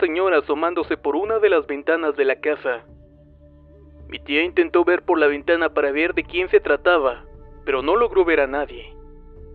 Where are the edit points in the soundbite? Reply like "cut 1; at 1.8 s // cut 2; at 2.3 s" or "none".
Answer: cut 1; at 1.0 s